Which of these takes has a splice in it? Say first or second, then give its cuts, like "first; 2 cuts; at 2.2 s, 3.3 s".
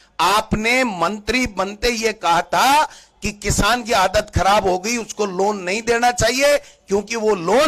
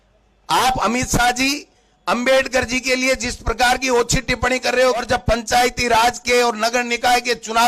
second; 1 cut; at 5.0 s